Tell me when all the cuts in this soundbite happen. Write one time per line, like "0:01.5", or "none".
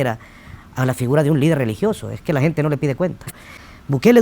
0:03.2